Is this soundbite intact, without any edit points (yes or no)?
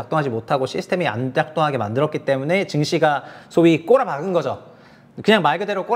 yes